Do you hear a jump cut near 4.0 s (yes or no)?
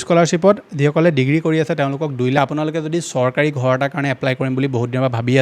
no